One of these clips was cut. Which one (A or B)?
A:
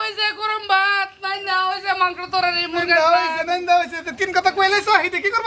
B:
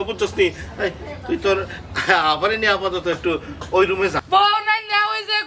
B